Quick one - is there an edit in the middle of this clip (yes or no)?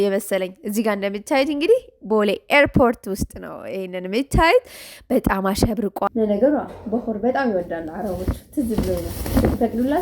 yes